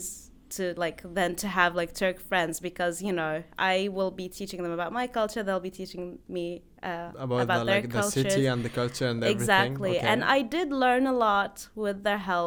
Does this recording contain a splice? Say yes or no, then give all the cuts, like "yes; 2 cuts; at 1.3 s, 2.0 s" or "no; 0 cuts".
no; 0 cuts